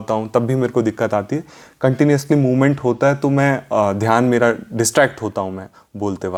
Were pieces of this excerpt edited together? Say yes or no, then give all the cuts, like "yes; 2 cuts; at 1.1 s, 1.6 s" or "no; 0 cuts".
no; 0 cuts